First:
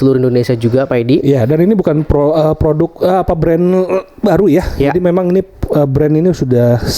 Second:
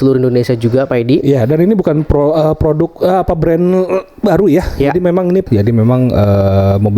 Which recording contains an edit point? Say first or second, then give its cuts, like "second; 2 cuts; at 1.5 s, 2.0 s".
second; 1 cut; at 5.5 s